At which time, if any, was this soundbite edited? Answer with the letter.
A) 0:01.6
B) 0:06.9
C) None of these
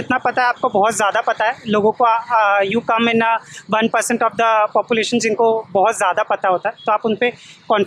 C